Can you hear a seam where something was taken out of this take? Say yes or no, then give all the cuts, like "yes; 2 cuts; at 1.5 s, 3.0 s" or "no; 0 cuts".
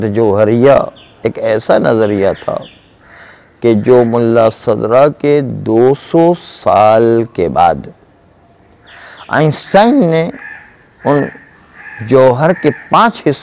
no; 0 cuts